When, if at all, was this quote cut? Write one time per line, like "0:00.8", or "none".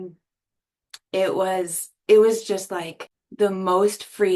none